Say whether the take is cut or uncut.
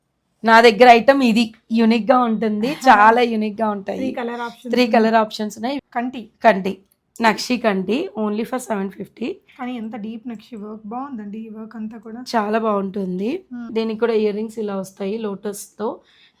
cut